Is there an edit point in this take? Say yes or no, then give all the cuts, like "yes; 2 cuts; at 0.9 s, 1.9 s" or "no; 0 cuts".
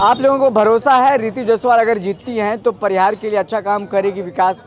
no; 0 cuts